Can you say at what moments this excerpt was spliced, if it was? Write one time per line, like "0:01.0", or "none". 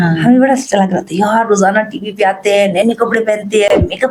none

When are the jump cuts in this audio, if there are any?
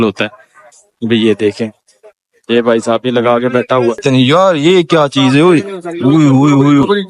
0:04.0

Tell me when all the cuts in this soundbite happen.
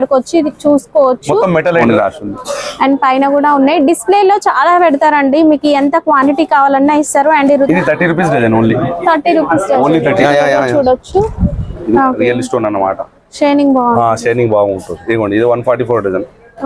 0:01.8
0:07.7
0:10.2
0:11.8

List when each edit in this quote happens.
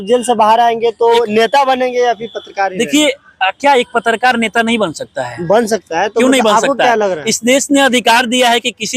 none

